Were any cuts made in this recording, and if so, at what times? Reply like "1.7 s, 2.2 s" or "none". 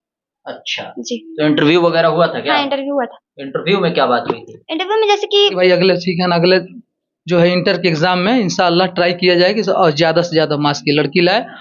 5.5 s